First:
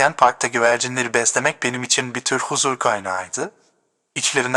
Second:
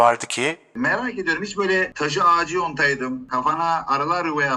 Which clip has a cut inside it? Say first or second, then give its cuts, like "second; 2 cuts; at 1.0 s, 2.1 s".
second; 3 cuts; at 0.8 s, 1.9 s, 3.3 s